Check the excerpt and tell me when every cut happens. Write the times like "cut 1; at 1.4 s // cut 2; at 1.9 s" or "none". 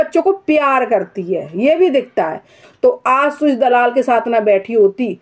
cut 1; at 2.6 s